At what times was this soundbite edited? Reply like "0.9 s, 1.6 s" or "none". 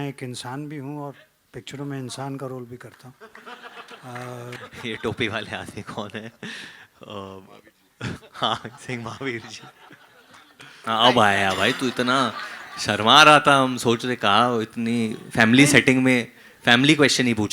4.6 s, 10.7 s